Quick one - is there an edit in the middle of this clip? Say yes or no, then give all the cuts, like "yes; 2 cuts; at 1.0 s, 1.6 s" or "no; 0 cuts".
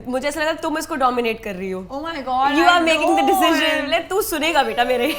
no; 0 cuts